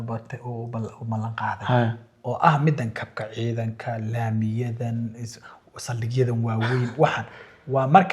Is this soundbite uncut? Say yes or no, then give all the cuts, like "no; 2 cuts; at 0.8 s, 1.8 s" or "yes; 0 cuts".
yes; 0 cuts